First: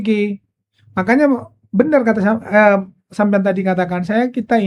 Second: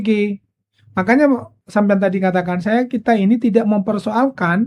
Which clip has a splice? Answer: second; 1 cut; at 1.5 s

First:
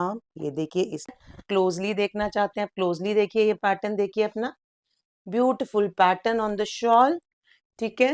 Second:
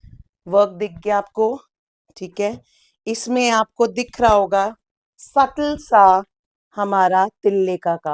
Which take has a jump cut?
first; 1 cut; at 1.1 s

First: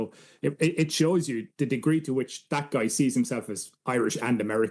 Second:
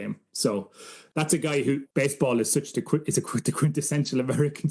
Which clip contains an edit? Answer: second; 2 cuts; at 1.0 s, 1.9 s

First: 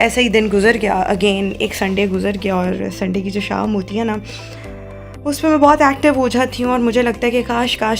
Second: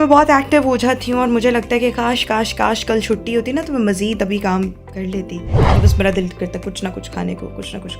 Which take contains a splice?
second; 1 cut; at 5.7 s

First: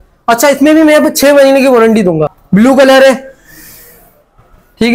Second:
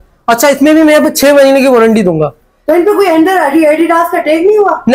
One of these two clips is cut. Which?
first; 1 cut; at 2.3 s

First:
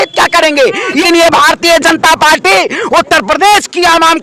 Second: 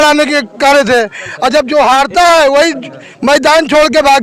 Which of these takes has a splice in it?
first; 1 cut; at 1.0 s

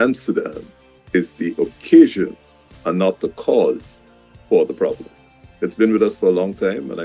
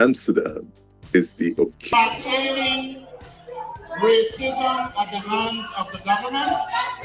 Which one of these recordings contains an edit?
second; 1 cut; at 1.9 s

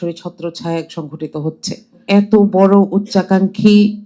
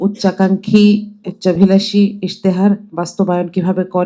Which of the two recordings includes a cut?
first; 1 cut; at 2.0 s

